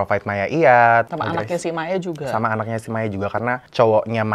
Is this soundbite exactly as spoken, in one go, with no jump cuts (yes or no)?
no